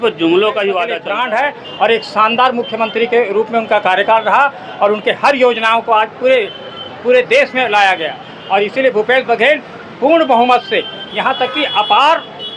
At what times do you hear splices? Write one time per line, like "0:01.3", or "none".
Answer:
0:01.0